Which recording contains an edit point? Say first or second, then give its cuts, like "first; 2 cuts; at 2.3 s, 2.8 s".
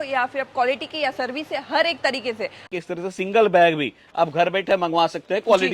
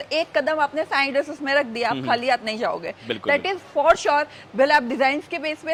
first; 1 cut; at 2.6 s